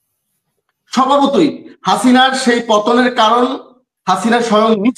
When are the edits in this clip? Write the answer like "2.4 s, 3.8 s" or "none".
none